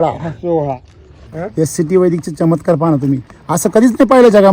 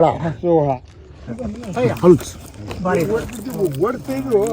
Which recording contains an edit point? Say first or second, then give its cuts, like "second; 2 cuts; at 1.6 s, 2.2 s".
first; 1 cut; at 1.3 s